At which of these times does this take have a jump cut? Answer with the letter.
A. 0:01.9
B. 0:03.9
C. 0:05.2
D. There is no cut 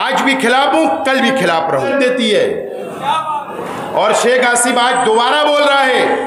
A